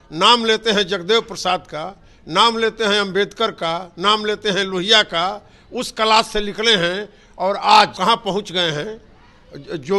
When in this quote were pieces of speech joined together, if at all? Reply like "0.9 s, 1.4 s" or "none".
7.9 s